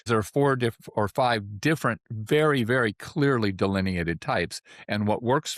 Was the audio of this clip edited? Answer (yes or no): no